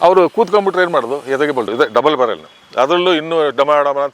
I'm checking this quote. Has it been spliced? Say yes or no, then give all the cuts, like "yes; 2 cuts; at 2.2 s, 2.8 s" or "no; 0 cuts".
yes; 1 cut; at 1.7 s